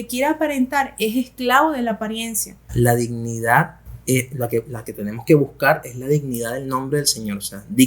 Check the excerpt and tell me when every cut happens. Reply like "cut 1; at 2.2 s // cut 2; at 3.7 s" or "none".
cut 1; at 2.6 s